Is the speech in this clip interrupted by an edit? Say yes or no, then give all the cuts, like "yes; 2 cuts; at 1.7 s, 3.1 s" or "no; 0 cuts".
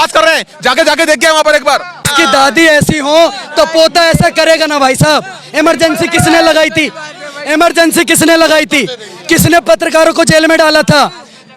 yes; 1 cut; at 2.1 s